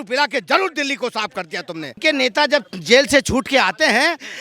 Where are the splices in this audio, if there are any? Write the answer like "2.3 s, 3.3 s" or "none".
2.0 s